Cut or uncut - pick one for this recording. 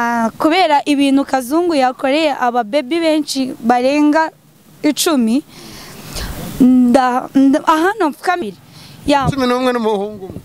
cut